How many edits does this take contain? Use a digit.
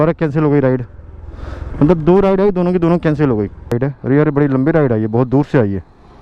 1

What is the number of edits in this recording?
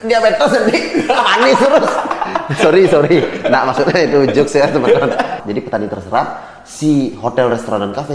1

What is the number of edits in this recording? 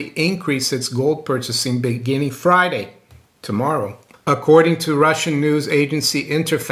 1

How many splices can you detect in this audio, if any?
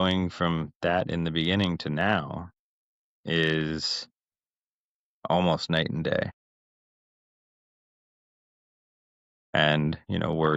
0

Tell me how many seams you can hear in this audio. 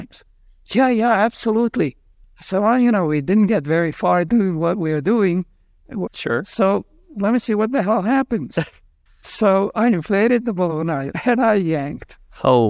3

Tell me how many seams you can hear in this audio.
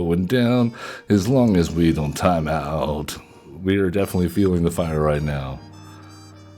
1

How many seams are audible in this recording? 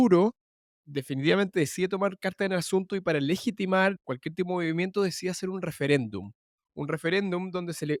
0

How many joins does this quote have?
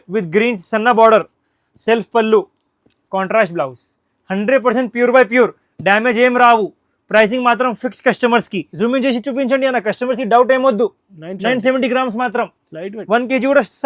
1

